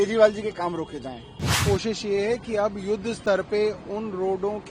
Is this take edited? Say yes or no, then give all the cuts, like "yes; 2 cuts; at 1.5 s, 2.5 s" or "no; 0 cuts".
yes; 1 cut; at 1.6 s